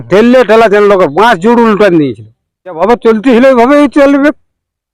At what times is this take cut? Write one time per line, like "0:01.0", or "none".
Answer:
0:02.8

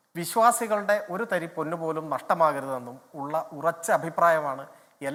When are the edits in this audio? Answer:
none

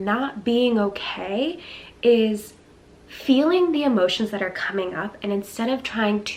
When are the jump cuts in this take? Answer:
none

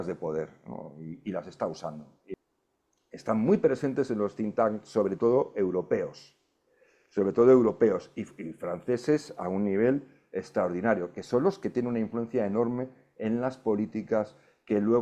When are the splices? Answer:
0:02.3

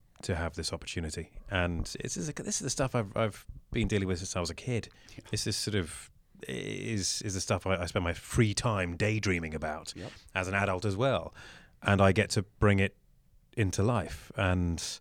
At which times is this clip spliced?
0:01.4

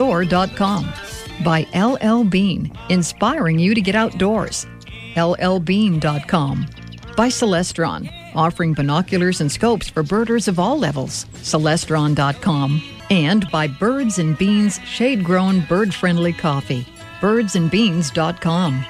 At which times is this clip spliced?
0:12.9

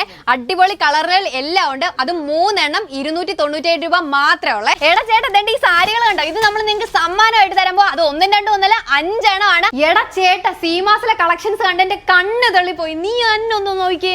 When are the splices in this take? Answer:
0:04.8
0:09.7

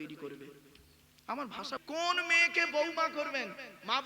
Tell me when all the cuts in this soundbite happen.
0:01.7

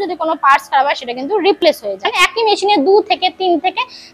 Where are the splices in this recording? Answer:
0:02.2

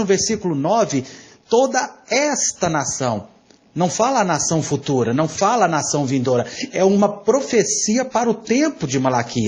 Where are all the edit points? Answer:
none

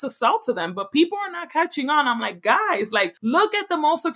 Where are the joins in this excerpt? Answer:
0:03.1

